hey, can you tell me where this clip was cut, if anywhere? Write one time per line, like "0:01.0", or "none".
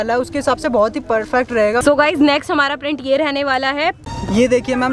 0:01.8
0:04.0